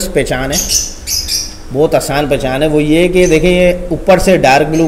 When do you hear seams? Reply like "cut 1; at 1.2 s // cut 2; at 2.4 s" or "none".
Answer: none